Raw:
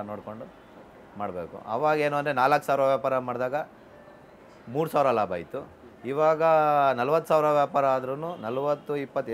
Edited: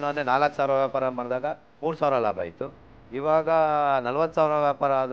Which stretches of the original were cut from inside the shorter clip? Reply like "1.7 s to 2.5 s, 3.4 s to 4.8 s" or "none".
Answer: 3.8 s to 4.6 s